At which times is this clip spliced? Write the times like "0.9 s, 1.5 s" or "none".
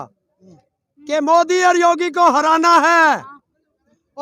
none